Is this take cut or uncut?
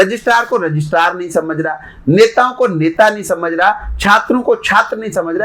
uncut